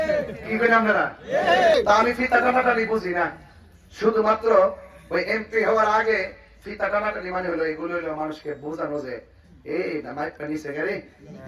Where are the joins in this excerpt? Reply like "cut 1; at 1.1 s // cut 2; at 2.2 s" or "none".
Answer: cut 1; at 1.7 s